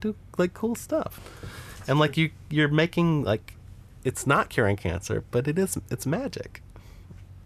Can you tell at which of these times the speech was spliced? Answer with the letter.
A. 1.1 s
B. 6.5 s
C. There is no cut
A